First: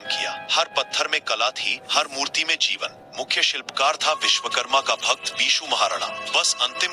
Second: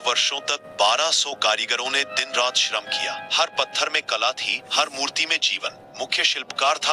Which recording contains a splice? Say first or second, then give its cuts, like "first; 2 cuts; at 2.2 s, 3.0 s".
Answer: first; 1 cut; at 6.0 s